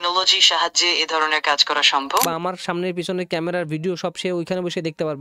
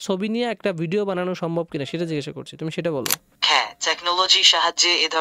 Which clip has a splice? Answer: first; 1 cut; at 2.2 s

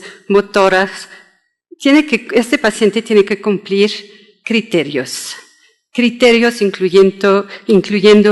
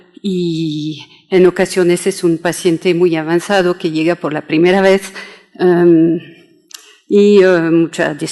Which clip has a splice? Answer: second; 1 cut; at 4.0 s

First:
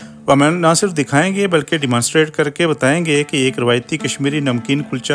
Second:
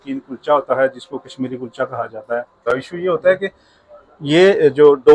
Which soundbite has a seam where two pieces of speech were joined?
second; 1 cut; at 2.6 s

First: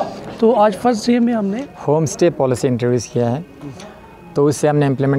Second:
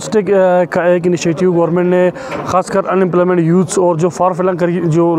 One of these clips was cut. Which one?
first; 1 cut; at 1.5 s

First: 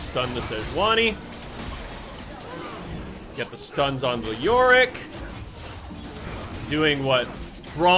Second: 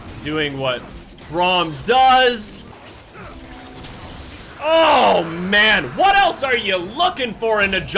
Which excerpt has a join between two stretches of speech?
second; 1 cut; at 2.7 s

